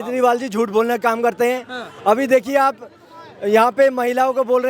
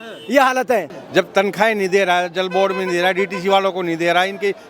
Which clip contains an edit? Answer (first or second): second